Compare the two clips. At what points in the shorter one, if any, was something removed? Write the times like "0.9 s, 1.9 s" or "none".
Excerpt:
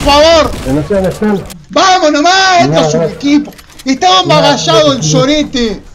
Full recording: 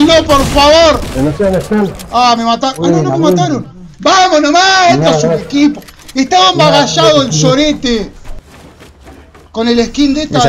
1.5 s